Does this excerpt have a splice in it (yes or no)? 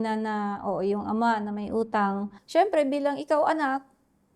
yes